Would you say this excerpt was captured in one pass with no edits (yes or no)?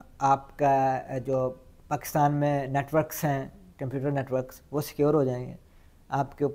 yes